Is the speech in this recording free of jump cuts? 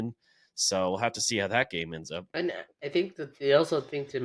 no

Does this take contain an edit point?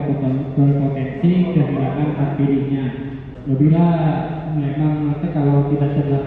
yes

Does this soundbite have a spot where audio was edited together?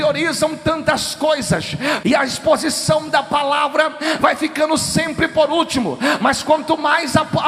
yes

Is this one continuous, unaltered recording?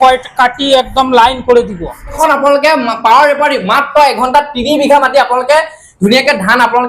no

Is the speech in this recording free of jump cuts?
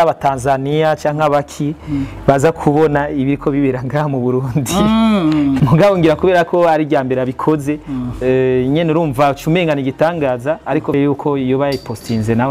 no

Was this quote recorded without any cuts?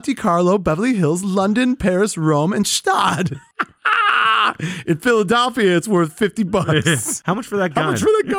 yes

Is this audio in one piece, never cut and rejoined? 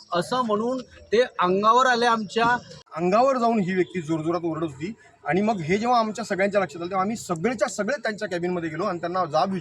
no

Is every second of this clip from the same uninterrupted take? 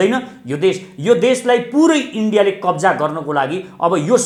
yes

